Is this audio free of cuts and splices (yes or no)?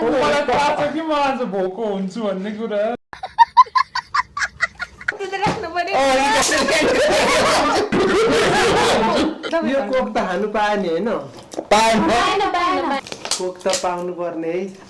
no